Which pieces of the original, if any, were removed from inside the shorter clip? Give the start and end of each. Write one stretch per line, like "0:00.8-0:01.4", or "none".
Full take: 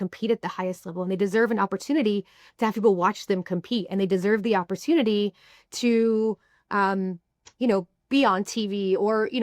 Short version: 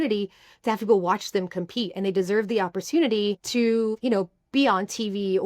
0:05.6-0:07.3